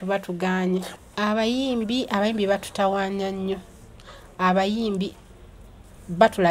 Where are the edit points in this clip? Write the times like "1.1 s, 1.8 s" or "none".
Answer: 0.9 s